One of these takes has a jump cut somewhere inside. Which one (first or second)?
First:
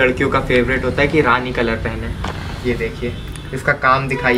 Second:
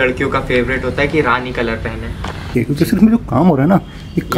second